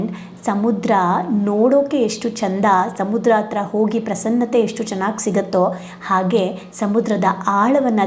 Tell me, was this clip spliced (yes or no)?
no